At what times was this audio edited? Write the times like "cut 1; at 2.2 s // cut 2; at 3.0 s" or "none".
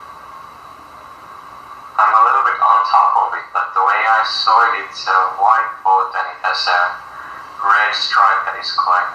cut 1; at 6.6 s